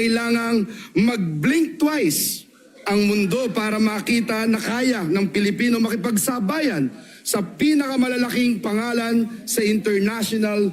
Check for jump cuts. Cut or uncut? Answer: uncut